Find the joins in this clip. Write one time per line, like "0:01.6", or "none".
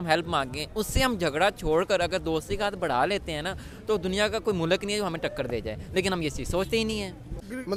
none